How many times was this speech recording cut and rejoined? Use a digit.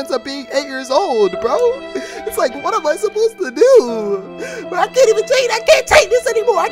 1